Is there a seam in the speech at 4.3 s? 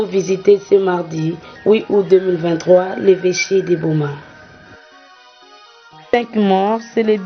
yes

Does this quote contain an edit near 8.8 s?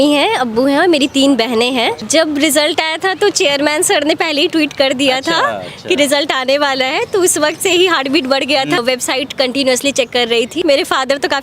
yes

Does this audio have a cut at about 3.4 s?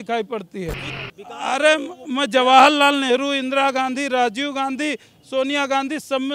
no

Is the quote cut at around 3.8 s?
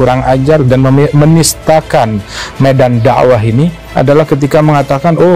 yes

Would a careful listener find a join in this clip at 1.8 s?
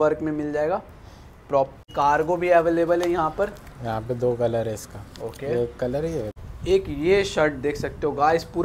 yes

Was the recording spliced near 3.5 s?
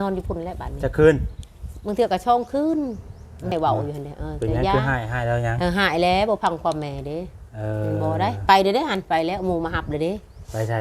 yes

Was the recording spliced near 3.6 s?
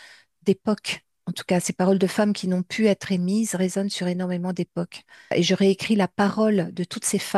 no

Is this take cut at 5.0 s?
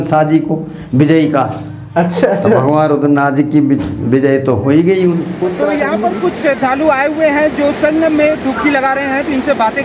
yes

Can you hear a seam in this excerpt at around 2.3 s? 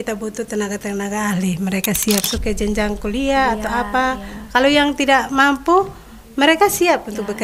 yes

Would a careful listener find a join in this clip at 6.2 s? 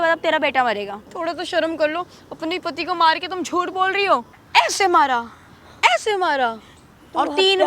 no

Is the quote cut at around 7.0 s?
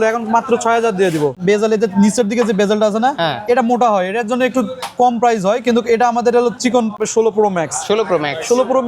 yes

